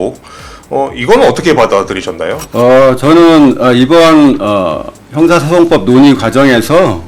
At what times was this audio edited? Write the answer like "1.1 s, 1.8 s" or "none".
2.4 s